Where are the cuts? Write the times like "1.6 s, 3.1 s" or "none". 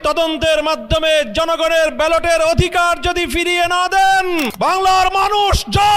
4.5 s